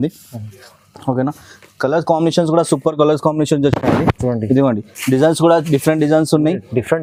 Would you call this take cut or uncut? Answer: uncut